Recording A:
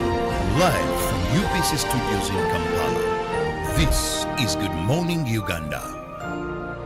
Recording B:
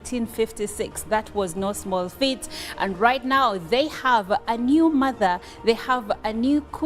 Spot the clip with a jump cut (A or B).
B